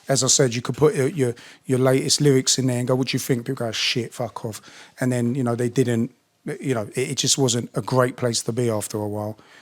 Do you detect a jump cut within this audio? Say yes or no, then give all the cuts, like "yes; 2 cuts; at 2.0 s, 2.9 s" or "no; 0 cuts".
no; 0 cuts